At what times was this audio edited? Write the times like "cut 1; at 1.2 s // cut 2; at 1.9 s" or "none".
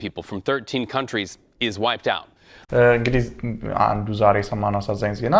cut 1; at 2.5 s